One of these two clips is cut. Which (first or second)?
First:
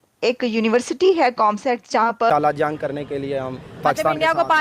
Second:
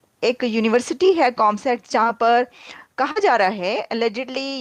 first